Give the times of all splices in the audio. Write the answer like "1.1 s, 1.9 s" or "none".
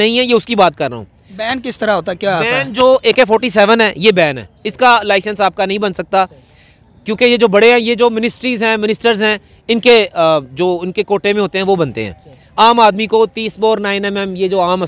none

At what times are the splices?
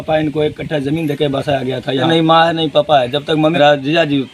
2.0 s, 3.5 s

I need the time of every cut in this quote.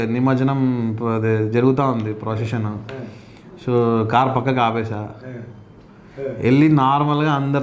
none

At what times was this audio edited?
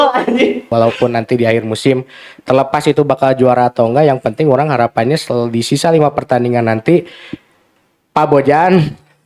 1.0 s

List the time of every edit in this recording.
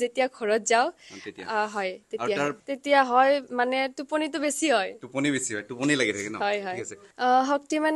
2.6 s, 7.0 s

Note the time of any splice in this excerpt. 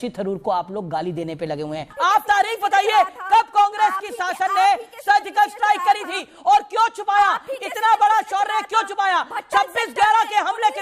1.9 s

